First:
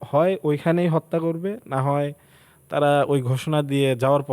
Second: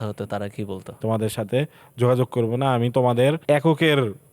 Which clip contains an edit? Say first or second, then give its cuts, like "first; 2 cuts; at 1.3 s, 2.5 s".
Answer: second; 2 cuts; at 1.0 s, 3.4 s